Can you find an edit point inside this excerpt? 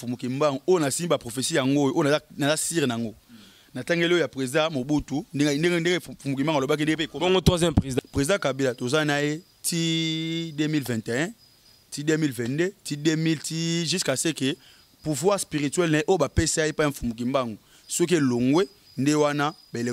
yes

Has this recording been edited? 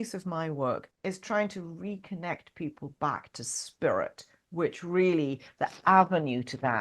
yes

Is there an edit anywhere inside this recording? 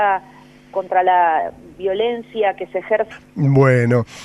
no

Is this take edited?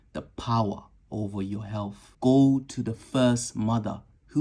yes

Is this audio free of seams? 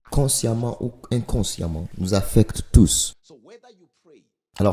yes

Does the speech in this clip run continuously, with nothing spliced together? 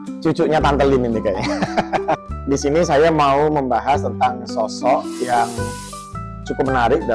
no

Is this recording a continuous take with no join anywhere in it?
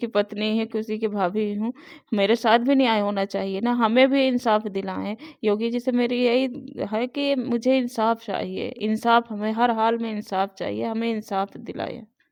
yes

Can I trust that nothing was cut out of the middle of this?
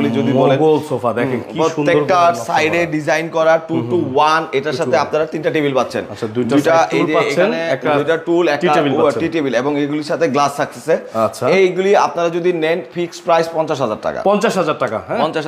yes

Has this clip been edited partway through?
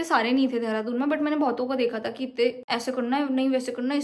yes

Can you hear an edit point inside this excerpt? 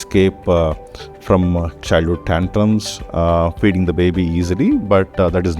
no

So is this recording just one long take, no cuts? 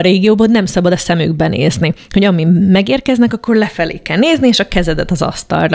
yes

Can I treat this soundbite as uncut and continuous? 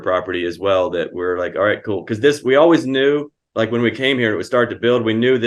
yes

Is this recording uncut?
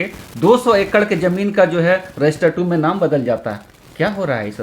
yes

